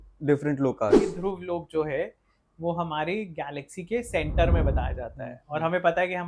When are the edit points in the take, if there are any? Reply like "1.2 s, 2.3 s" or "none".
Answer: 1.0 s